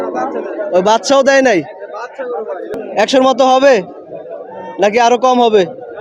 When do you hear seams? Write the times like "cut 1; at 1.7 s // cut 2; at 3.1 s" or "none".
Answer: cut 1; at 2.8 s